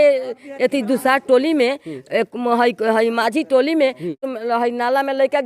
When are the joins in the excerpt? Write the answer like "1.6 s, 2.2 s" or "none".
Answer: 4.2 s